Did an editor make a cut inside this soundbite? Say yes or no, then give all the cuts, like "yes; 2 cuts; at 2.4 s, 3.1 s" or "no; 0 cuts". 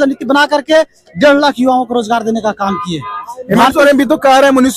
no; 0 cuts